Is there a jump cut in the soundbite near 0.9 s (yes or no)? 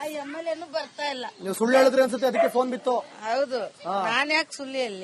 no